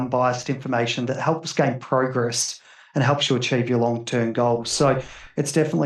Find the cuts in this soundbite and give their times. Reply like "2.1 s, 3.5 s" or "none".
none